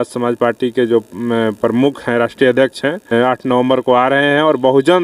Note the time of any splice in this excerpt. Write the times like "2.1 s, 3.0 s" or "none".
3.1 s